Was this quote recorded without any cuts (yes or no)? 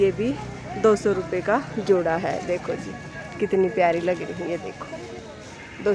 yes